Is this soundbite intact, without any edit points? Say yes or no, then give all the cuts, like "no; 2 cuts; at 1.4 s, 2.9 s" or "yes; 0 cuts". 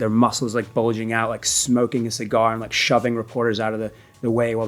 yes; 0 cuts